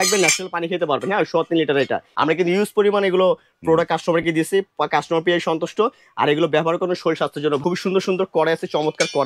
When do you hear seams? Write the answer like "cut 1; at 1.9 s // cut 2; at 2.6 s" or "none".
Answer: cut 1; at 2.0 s // cut 2; at 7.6 s